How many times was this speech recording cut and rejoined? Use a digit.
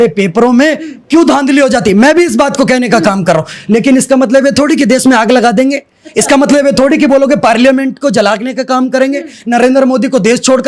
0